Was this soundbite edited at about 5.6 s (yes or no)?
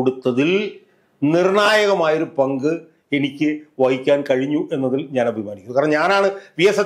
no